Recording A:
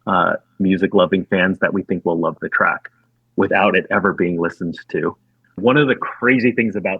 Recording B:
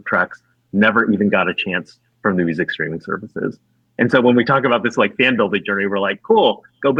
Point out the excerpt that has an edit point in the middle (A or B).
A